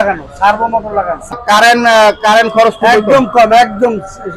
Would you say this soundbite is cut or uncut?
cut